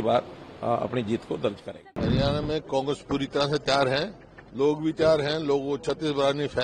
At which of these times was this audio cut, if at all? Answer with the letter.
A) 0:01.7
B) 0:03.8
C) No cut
A